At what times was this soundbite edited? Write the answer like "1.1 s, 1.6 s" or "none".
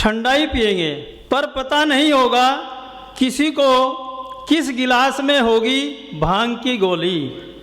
1.1 s